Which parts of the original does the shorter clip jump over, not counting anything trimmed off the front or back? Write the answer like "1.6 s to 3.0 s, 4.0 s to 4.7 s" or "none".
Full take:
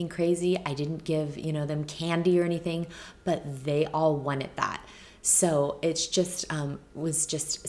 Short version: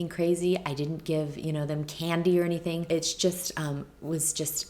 2.8 s to 5.8 s